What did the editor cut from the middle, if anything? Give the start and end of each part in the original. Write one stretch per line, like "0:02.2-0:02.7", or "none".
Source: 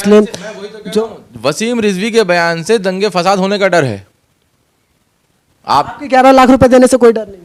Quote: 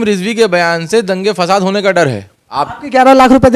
0:04.3-0:05.8

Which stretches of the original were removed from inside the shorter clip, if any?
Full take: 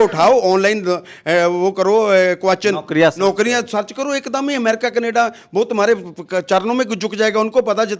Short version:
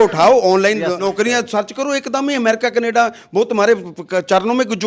0:01.0-0:03.2

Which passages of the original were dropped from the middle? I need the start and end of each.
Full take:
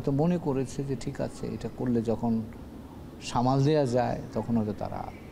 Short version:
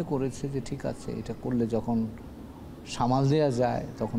none

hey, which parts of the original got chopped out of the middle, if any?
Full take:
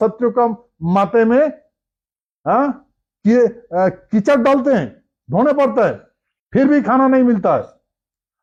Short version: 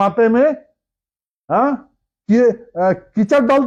none

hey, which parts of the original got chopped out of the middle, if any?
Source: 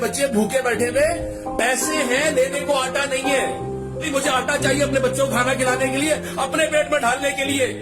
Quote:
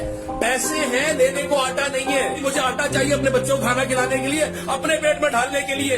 0:03.5-0:04.1

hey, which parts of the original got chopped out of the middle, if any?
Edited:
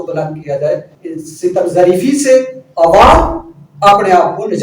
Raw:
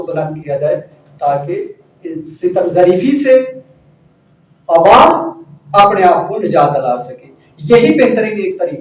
0:01.0-0:02.0
0:03.6-0:04.5

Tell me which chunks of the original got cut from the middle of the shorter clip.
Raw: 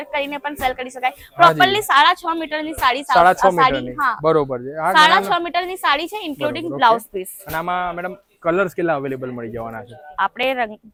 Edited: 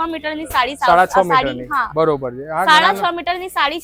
none

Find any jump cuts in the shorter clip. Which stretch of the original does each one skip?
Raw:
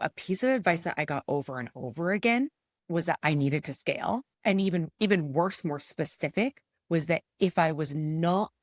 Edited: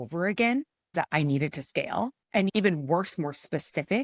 0:02.8-0:03.0
0:04.6-0:05.0

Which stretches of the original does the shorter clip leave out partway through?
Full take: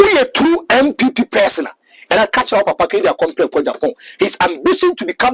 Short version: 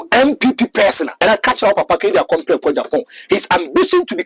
0:01.6-0:02.0

